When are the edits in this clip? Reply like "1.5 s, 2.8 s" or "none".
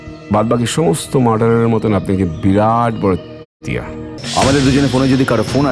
4.2 s